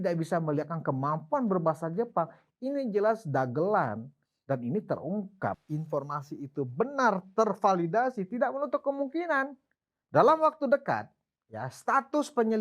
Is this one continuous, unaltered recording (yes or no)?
no